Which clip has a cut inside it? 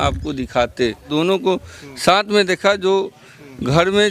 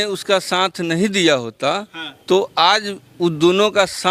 first; 1 cut; at 1.1 s

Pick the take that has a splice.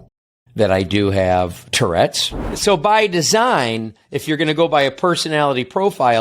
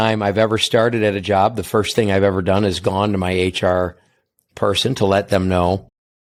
first; 1 cut; at 2.5 s

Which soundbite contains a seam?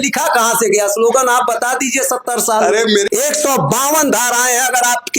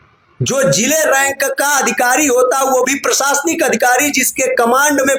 first; 1 cut; at 3.1 s

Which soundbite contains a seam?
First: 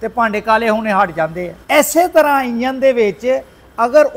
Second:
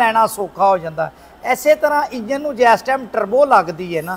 first; 1 cut; at 1.5 s

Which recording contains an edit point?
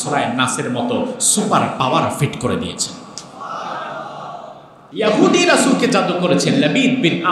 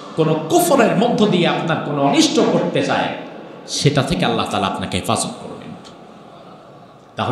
first; 1 cut; at 4.7 s

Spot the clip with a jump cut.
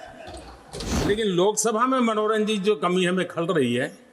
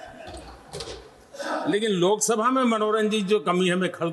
first; 1 cut; at 1.0 s

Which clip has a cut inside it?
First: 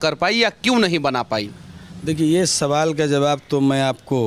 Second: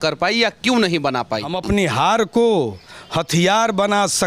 second; 1 cut; at 1.5 s

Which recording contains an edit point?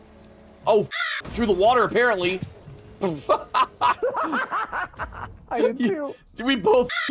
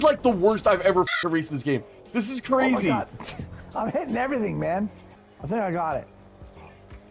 second; 1 cut; at 5.0 s

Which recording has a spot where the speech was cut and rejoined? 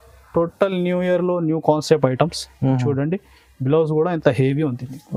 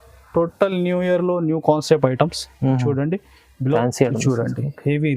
second; 1 cut; at 3.8 s

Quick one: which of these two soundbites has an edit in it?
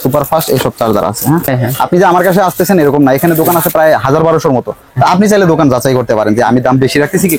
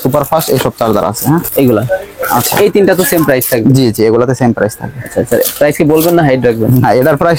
first; 1 cut; at 1.5 s

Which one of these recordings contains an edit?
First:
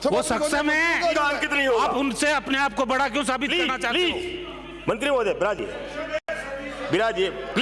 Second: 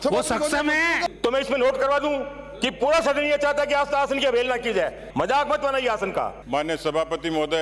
second; 3 cuts; at 1.0 s, 5.0 s, 6.4 s

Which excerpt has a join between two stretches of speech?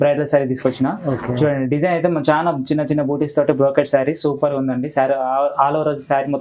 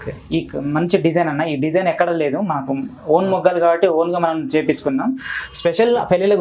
second; 1 cut; at 5.3 s

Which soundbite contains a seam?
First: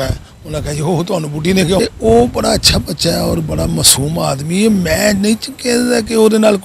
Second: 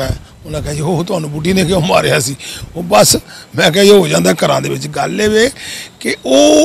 first; 1 cut; at 1.8 s

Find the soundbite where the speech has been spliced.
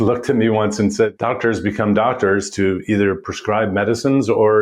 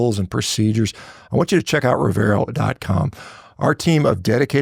first; 1 cut; at 1.1 s

